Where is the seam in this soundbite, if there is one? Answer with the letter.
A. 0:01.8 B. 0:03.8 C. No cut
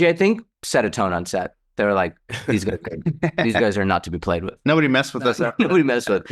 C